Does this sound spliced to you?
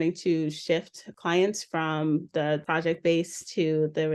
yes; 2 cuts; at 1.1 s, 2.7 s

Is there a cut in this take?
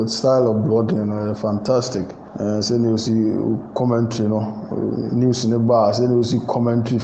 no; 0 cuts

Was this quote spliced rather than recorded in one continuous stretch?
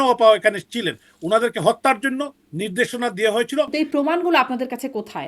yes; 1 cut; at 3.7 s

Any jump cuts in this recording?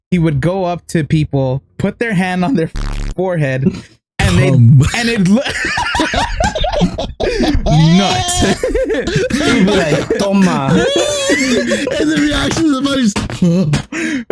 no; 0 cuts

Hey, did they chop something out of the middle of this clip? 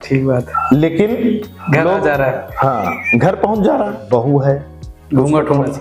yes; 1 cut; at 4.0 s

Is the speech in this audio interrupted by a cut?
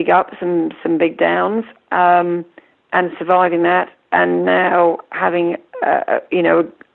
no; 0 cuts

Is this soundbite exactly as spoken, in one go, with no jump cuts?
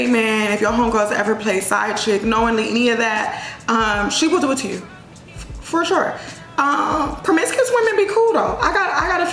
yes; 0 cuts

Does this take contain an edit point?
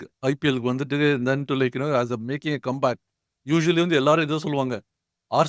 no; 0 cuts

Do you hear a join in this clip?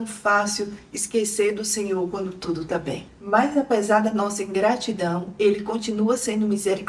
yes; 1 cut; at 3.0 s

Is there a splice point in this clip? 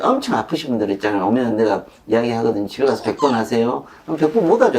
no; 0 cuts

